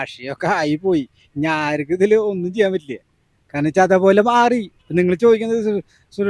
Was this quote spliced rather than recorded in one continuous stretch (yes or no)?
no